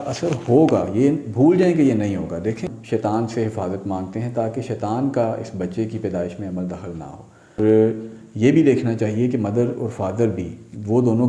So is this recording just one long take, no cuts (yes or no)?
no